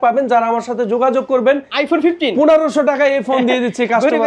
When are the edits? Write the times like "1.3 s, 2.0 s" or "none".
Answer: 1.7 s